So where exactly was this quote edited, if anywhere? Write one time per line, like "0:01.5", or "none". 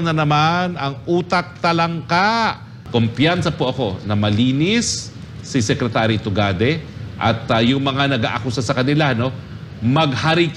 0:02.7